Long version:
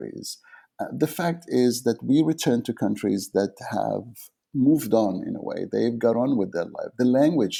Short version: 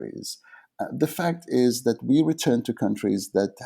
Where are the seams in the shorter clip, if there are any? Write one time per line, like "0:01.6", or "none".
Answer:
none